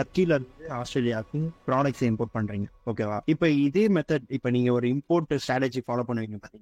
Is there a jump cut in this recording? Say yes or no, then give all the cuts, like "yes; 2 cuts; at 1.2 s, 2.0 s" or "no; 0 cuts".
no; 0 cuts